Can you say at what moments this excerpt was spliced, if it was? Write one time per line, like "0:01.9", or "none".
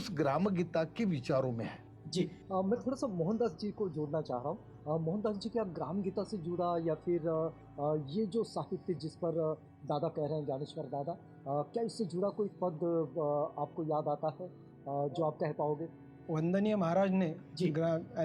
none